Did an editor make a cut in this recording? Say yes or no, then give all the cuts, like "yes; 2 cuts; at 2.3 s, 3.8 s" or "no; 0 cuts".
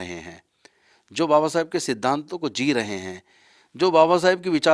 no; 0 cuts